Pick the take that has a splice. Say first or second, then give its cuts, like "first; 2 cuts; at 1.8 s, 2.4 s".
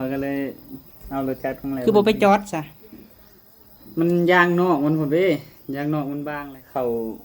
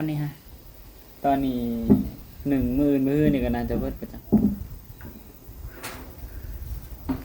first; 1 cut; at 6.3 s